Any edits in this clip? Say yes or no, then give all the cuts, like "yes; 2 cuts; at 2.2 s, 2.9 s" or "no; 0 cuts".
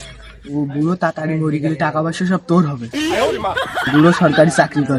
no; 0 cuts